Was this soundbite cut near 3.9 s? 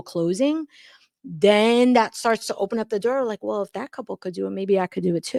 no; 0 cuts

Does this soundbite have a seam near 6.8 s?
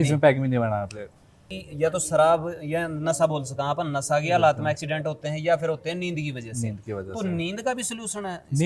no; 1 cut; at 1.5 s

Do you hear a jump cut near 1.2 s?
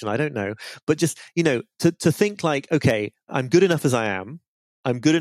no; 1 cut; at 3.3 s

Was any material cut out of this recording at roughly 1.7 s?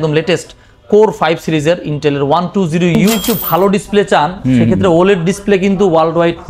no; 1 cut; at 3.1 s

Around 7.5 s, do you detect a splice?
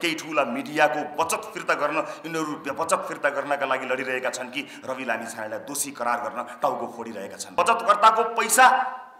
yes; 1 cut; at 7.5 s

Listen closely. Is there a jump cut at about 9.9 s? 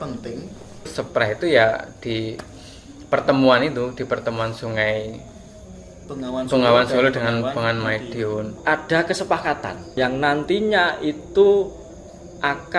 yes; 3 cuts; at 0.9 s, 8.5 s, 9.9 s

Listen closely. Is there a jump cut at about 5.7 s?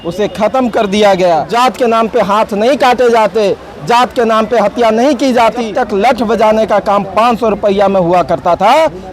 yes; 2 cuts; at 1.5 s, 5.7 s

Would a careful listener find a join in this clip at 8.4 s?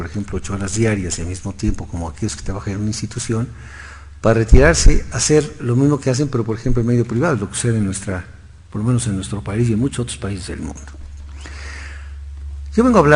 no; 0 cuts

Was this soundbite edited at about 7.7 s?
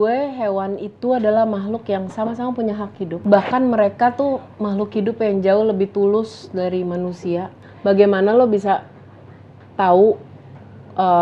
yes; 2 cuts; at 3.2 s, 7.7 s

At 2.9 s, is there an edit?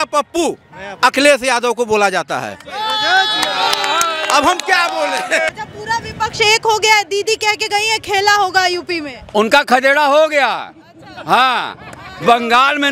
no; 1 cut; at 5.5 s

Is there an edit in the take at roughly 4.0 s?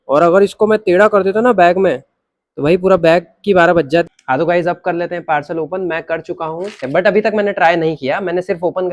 yes; 2 cuts; at 4.0 s, 6.9 s

